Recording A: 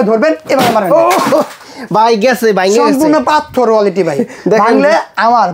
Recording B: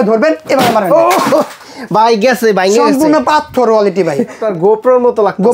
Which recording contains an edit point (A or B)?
B